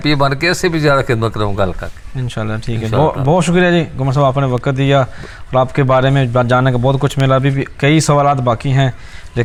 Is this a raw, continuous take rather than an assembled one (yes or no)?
yes